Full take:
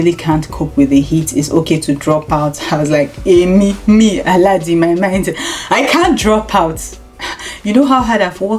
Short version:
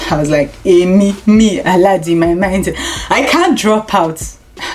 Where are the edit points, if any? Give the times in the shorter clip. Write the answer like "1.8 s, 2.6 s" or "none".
none

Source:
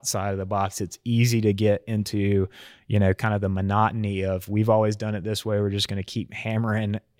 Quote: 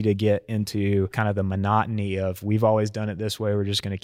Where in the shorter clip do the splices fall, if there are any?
1.2 s

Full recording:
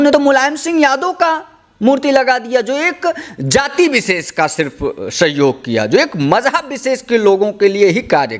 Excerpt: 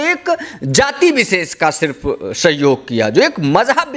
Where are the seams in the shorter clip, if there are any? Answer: none

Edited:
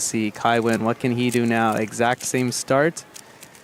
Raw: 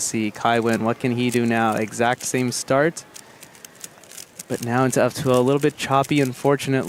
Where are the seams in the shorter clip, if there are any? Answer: none

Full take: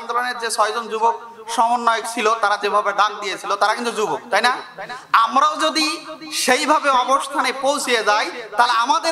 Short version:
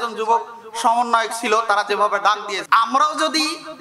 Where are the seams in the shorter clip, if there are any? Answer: 2.5 s

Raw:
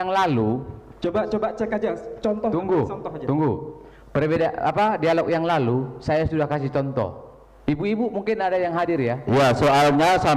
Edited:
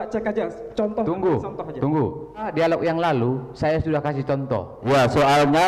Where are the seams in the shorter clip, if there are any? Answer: 2.5 s, 4.8 s

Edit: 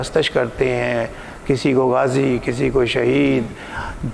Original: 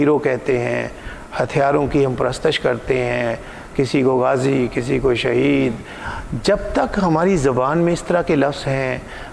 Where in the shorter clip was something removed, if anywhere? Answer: none

